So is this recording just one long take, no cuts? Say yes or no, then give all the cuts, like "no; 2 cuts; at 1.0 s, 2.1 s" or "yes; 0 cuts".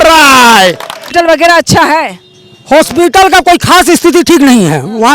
no; 1 cut; at 1.0 s